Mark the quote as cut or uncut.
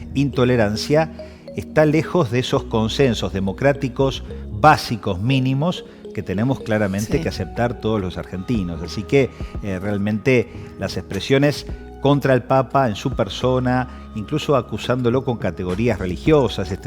uncut